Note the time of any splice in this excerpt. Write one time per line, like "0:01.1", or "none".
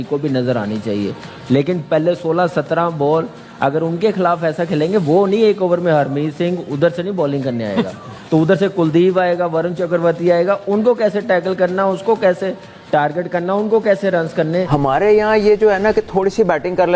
0:14.7